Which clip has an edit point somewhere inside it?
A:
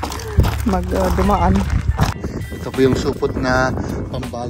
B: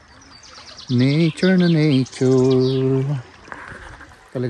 A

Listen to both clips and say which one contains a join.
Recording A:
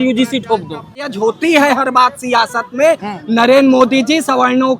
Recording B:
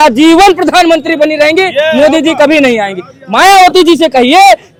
A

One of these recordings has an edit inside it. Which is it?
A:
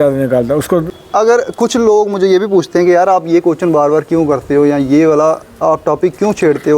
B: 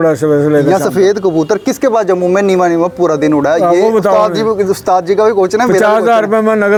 A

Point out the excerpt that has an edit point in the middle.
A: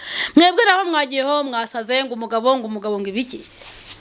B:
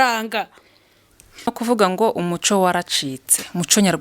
B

